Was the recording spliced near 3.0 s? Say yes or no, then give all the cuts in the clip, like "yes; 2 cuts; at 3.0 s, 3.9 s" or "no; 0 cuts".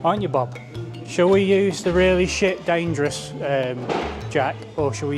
no; 1 cut; at 1.0 s